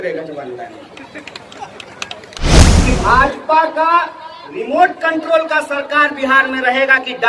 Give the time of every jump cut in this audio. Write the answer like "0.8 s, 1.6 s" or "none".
2.6 s

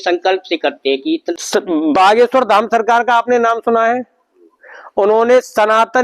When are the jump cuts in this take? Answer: 1.3 s

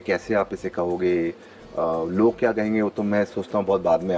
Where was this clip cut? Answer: none

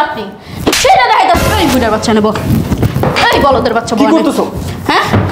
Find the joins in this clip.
1.5 s

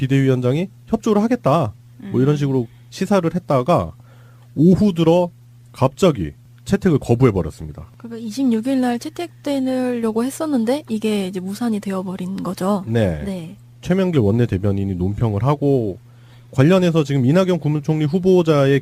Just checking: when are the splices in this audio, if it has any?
11.8 s

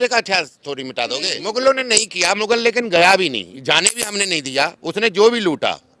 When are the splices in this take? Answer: 1.3 s

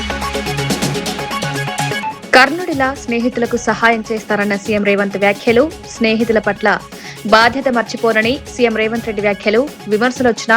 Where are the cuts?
1.5 s

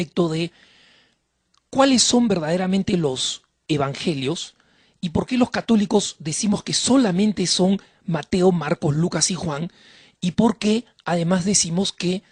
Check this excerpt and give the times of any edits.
none

